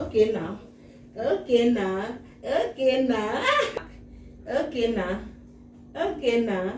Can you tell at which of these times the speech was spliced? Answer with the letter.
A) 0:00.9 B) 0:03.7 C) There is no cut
B